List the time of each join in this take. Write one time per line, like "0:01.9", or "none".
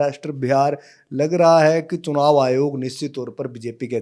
none